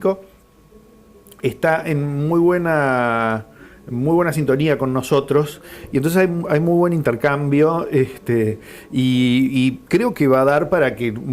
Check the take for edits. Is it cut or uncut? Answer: cut